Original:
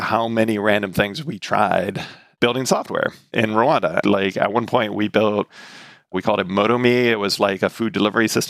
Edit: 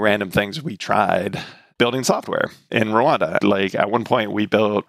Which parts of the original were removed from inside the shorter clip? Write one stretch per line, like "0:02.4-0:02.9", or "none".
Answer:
none